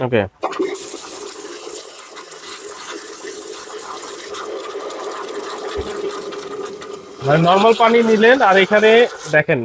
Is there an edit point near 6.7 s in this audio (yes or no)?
no